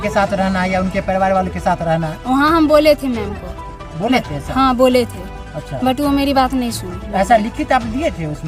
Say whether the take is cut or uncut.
uncut